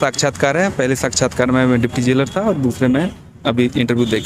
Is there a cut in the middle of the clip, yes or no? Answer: no